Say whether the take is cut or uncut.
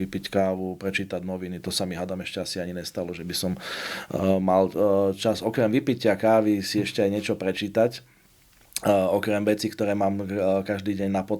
uncut